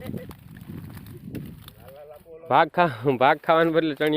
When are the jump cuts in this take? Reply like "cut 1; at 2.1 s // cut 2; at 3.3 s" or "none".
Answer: cut 1; at 1.5 s